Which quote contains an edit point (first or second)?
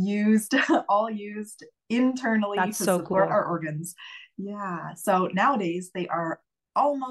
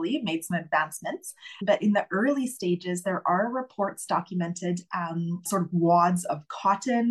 second